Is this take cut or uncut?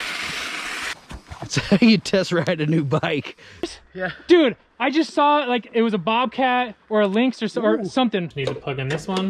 cut